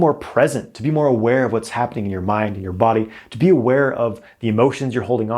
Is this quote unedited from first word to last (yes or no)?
yes